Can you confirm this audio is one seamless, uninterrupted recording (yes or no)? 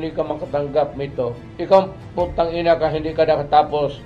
no